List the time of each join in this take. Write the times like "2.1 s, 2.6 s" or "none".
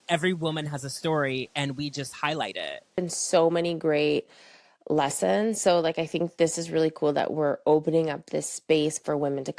3.0 s